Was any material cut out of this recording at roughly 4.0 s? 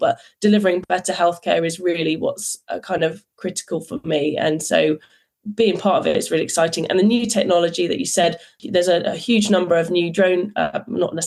no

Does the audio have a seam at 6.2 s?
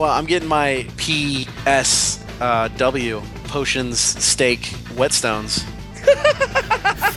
no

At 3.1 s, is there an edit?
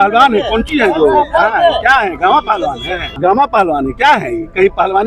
yes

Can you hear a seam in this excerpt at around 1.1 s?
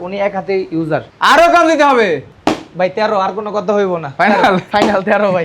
yes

